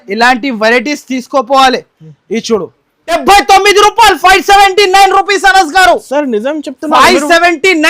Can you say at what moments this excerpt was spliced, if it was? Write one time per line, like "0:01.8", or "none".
0:03.2